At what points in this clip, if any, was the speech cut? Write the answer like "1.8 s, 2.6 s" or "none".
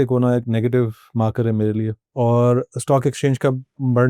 2.0 s